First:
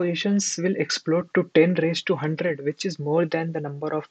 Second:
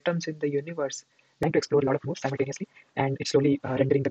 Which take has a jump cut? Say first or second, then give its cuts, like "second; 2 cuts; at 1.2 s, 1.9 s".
second; 1 cut; at 1.4 s